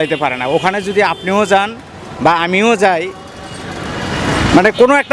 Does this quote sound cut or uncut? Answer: uncut